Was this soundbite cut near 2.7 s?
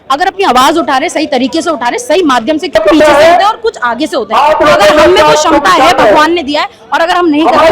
yes; 1 cut; at 2.7 s

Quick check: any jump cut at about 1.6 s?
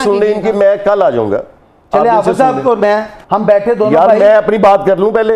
no; 1 cut; at 3.2 s

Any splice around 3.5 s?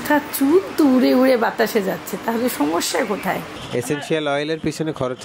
yes; 1 cut; at 3.5 s

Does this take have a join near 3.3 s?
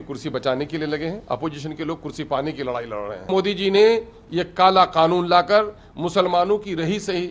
yes; 1 cut; at 3.3 s

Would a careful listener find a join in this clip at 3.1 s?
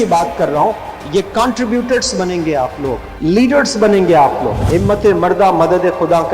yes; 2 cuts; at 3.1 s, 4.6 s

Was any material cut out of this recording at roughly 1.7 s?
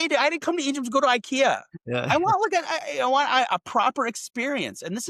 yes; 1 cut; at 1.7 s

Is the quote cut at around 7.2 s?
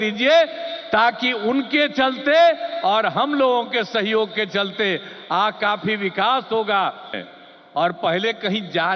yes; 1 cut; at 7.2 s

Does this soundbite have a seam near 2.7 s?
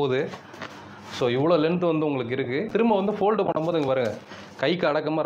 yes; 1 cut; at 2.7 s

